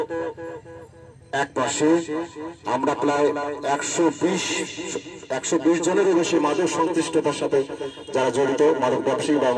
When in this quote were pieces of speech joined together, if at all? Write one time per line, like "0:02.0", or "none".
none